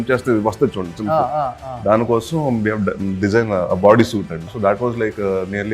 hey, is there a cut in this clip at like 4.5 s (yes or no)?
yes